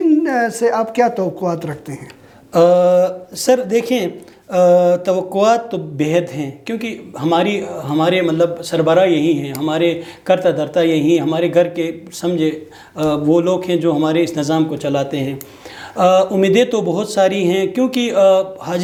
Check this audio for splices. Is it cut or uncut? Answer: uncut